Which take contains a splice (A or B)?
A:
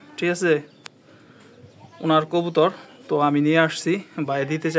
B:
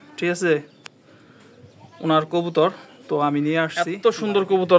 B